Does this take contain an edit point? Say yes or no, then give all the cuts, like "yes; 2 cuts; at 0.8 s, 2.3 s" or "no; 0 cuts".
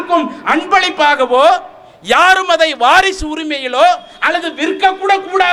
no; 0 cuts